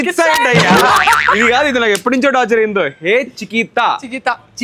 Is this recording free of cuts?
yes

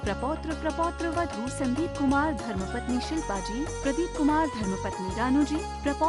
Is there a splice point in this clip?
no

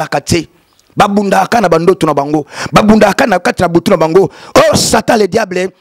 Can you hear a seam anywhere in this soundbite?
no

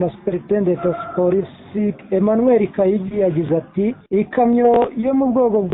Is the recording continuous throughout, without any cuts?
no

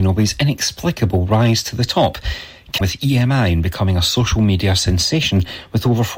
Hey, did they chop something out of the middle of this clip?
yes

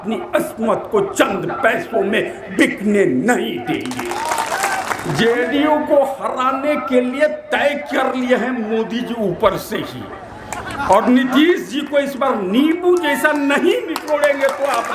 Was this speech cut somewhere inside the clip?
yes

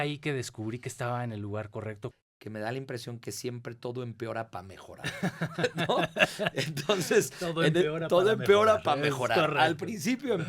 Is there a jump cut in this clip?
yes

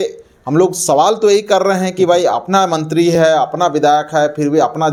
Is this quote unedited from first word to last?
yes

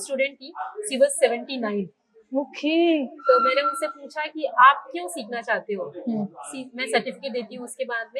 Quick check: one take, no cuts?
yes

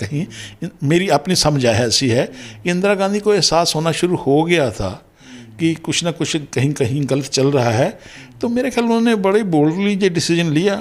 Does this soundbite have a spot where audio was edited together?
no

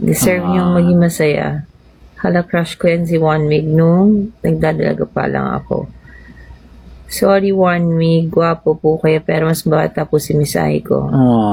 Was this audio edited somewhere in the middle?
no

